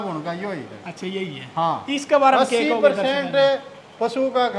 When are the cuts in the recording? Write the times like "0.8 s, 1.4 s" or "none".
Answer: none